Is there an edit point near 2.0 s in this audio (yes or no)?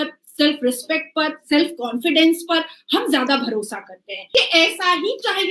no